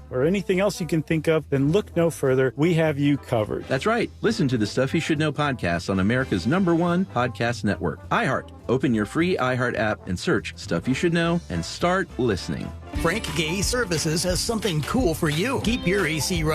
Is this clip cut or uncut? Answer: uncut